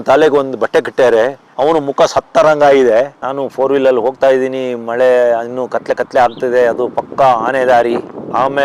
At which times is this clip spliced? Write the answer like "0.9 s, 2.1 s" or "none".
3.2 s